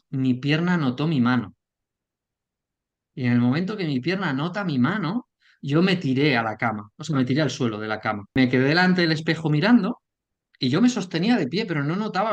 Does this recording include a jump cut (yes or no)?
yes